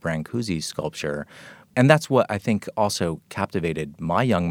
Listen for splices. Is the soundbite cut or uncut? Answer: cut